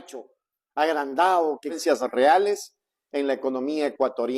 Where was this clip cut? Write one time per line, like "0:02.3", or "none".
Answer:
0:01.8